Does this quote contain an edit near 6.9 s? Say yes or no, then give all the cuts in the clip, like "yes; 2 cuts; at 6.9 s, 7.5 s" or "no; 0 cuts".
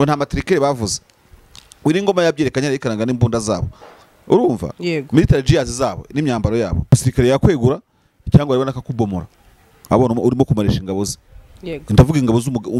yes; 1 cut; at 6.9 s